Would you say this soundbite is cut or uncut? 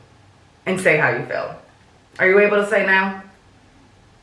uncut